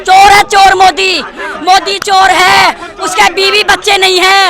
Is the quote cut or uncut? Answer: uncut